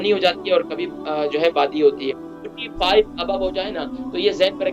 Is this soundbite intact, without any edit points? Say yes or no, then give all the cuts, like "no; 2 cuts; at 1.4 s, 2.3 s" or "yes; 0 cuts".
no; 1 cut; at 2.3 s